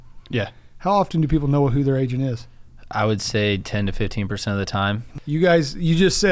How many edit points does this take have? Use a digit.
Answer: 1